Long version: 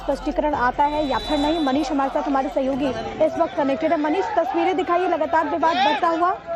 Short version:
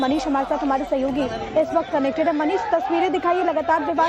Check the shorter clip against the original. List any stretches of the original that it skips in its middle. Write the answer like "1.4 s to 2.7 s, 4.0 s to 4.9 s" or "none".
none